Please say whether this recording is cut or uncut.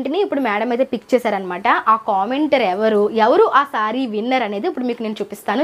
uncut